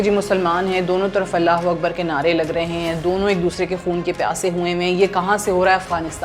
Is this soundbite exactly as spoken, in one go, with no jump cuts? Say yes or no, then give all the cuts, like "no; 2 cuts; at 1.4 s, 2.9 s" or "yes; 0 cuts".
yes; 0 cuts